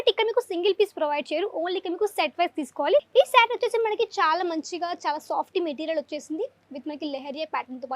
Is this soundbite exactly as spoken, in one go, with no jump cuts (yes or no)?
no